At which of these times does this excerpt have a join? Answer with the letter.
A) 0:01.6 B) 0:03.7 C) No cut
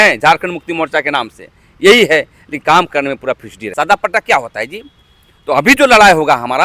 B